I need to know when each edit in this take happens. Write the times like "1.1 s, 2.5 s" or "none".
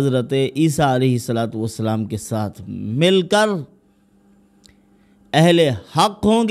none